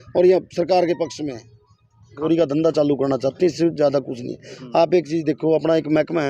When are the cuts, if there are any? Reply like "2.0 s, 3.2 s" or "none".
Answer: 2.2 s